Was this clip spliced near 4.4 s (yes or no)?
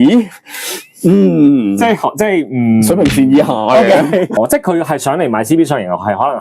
yes